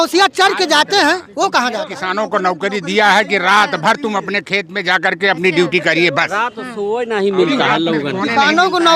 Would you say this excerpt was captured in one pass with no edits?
no; 1 cut; at 2.0 s

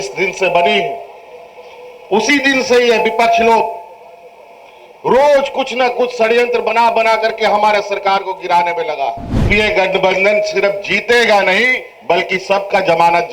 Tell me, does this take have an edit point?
yes; 1 cut; at 9.5 s

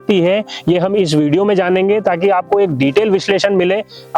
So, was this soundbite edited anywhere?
no; 0 cuts

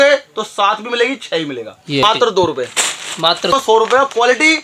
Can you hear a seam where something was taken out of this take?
yes; 2 cuts; at 2.0 s, 3.5 s

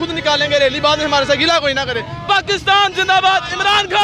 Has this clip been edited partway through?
no; 0 cuts

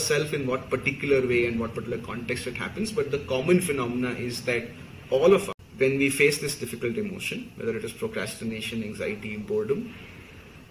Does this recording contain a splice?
yes; 1 cut; at 5.6 s

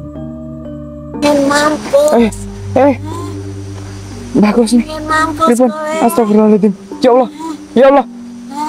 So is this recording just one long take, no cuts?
no; 1 cut; at 1.2 s

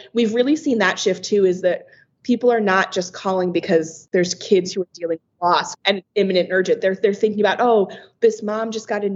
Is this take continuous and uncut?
no; 2 cuts; at 4.0 s, 5.8 s

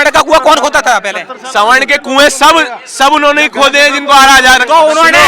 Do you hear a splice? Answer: no; 0 cuts

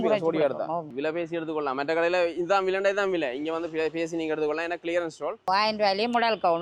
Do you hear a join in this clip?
yes; 2 cuts; at 0.9 s, 5.5 s

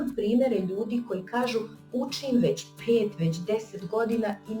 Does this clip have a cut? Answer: no; 0 cuts

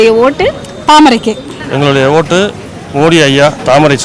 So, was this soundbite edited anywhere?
no; 0 cuts

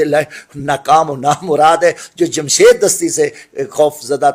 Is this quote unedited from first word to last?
yes; 0 cuts

